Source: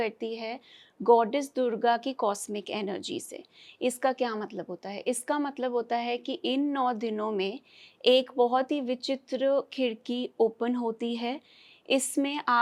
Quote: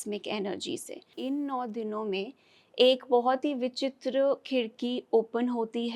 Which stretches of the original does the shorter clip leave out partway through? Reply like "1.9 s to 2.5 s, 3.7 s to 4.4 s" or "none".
3.5 s to 6.4 s